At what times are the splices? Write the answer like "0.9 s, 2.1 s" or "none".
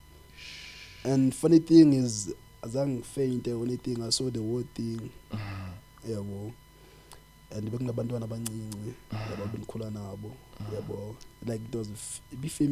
none